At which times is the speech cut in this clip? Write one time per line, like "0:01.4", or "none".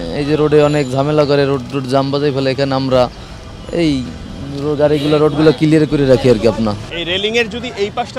0:06.9